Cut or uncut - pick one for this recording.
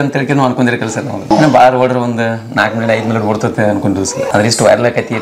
cut